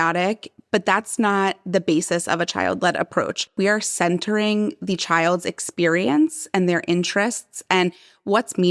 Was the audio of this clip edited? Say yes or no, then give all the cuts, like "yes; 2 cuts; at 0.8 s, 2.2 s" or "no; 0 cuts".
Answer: yes; 1 cut; at 3.6 s